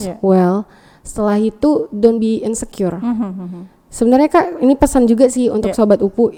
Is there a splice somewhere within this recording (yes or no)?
no